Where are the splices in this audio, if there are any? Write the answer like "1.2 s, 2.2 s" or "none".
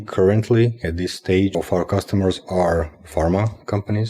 1.5 s